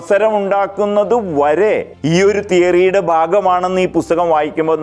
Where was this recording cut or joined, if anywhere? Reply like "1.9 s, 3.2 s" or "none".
1.9 s